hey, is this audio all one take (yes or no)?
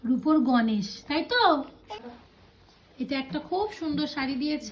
no